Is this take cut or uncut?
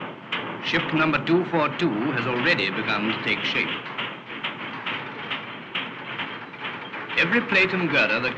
cut